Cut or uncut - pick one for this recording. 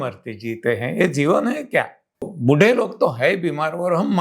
cut